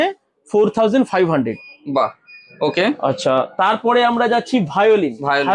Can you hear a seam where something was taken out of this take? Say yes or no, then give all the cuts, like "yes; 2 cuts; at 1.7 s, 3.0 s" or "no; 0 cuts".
no; 0 cuts